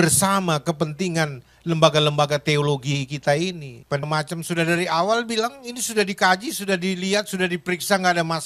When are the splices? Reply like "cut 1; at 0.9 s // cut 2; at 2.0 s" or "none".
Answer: cut 1; at 4.1 s